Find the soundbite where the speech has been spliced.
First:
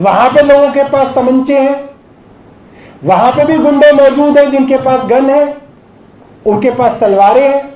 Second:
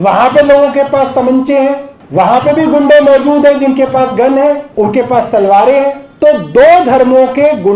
second; 3 cuts; at 1.9 s, 4.7 s, 6.1 s

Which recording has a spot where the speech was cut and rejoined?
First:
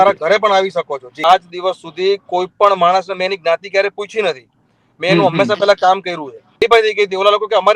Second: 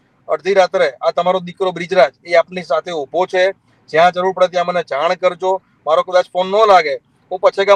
first; 2 cuts; at 1.2 s, 6.6 s

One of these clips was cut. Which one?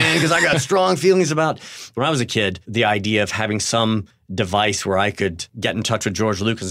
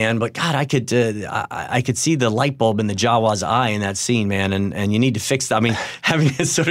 first; 4 cuts; at 1.9 s, 2.6 s, 4.2 s, 5.5 s

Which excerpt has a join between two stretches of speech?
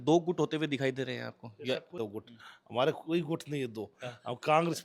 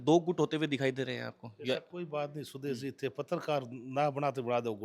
first; 1 cut; at 2.0 s

